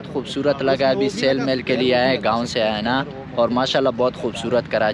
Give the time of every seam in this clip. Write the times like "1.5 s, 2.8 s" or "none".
none

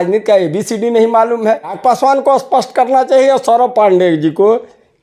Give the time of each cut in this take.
1.8 s

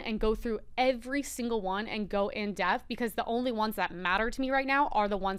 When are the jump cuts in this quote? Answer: none

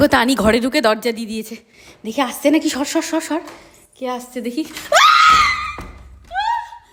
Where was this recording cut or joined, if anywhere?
none

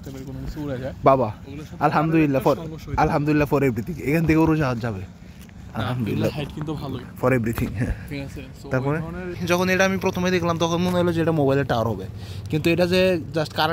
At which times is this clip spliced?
9.4 s

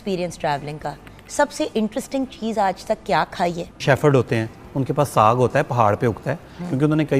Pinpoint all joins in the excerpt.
3.8 s

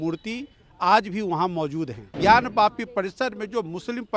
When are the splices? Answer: 2.1 s

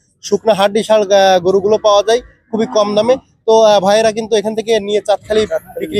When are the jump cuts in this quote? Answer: none

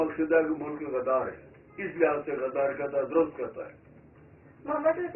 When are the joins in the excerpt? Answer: none

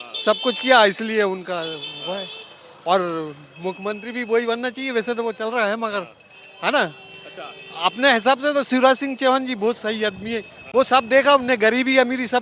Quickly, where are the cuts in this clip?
none

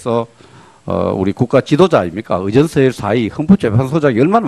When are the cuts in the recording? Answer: 2.1 s

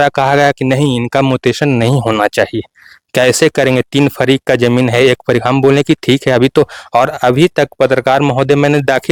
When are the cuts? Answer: none

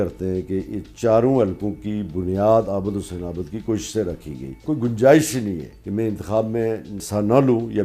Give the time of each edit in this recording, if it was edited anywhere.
4.6 s, 5.7 s, 7.0 s

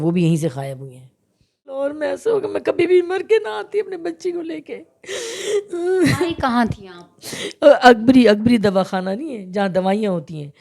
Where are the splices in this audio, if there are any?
1.8 s

